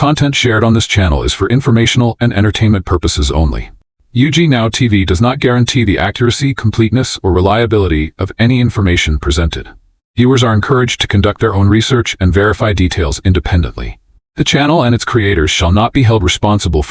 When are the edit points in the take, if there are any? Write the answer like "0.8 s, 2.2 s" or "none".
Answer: none